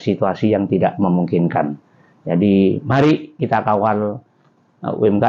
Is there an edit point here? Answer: no; 0 cuts

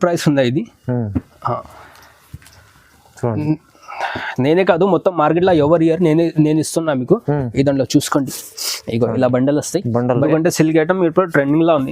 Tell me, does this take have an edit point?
yes; 1 cut; at 10.2 s

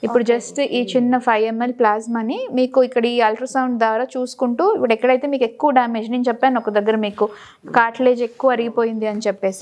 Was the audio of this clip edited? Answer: no; 0 cuts

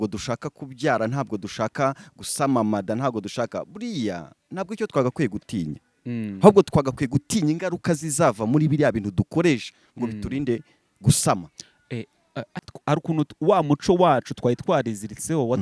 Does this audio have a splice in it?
yes; 1 cut; at 12.6 s

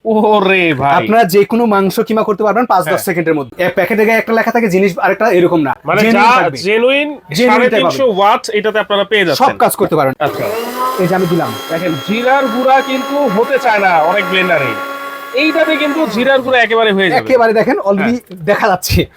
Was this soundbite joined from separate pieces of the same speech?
yes; 2 cuts; at 3.5 s, 10.1 s

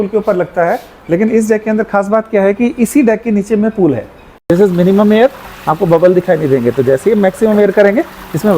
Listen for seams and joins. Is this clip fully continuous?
no; 1 cut; at 4.5 s

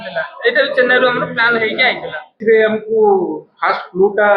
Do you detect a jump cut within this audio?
yes; 1 cut; at 2.4 s

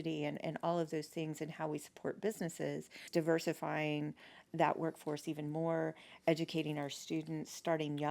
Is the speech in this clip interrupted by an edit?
yes; 1 cut; at 3.0 s

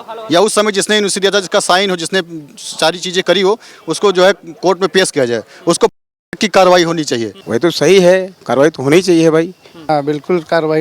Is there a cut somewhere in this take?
yes; 2 cuts; at 7.4 s, 9.9 s

